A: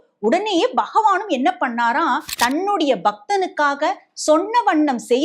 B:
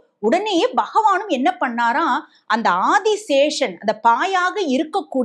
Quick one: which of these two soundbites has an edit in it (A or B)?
A